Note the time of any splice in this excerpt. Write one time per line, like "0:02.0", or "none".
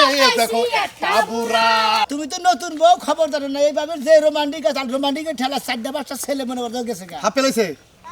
0:02.2